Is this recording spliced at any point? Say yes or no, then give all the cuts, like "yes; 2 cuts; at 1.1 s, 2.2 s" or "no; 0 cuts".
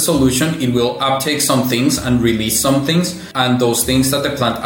yes; 1 cut; at 3.2 s